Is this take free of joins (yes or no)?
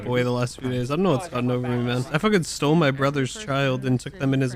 no